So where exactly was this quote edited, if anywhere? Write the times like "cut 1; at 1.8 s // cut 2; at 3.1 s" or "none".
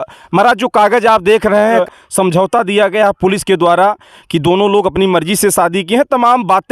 cut 1; at 1.8 s